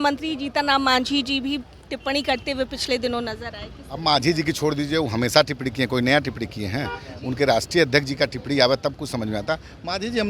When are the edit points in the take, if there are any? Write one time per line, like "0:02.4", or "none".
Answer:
none